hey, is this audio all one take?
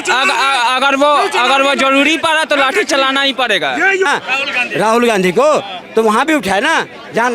no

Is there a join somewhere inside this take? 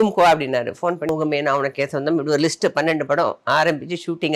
yes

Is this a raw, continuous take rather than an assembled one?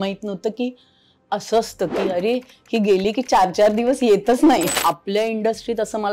no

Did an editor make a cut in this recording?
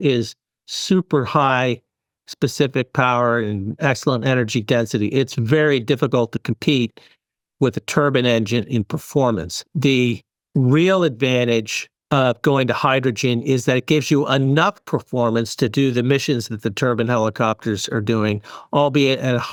no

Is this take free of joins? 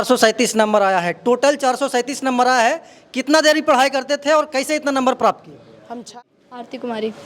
no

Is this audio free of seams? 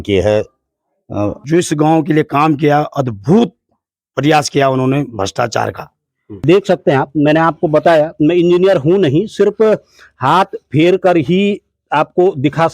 no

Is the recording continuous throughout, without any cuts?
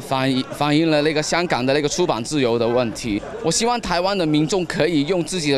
no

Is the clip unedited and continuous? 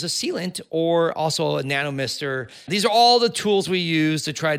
no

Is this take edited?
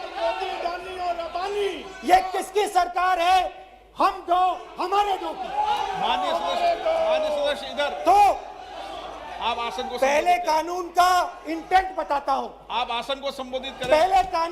no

